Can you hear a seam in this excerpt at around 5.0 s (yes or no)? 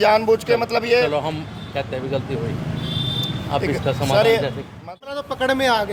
yes